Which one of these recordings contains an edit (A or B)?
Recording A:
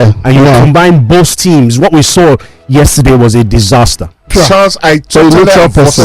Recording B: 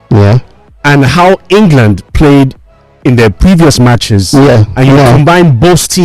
A